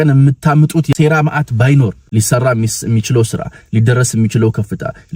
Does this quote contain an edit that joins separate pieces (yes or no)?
yes